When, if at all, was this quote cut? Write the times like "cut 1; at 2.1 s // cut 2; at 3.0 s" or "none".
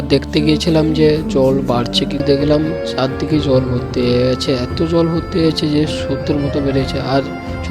cut 1; at 2.2 s